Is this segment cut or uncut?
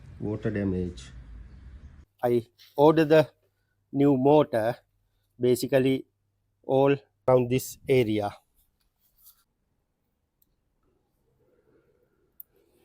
cut